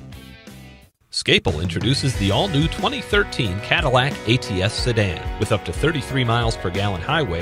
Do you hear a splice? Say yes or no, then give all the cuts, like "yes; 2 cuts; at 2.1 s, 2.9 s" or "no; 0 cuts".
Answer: yes; 1 cut; at 1.1 s